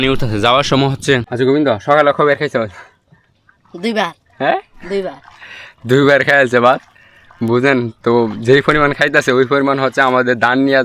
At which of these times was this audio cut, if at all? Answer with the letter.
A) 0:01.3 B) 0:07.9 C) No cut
A